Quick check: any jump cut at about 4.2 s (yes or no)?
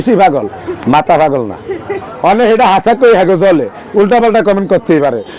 no